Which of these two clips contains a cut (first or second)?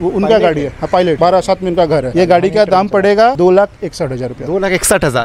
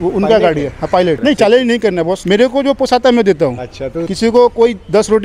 second